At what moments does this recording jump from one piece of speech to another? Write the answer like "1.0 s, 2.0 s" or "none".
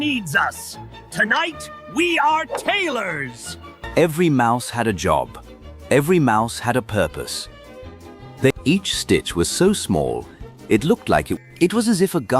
3.7 s, 8.5 s, 11.4 s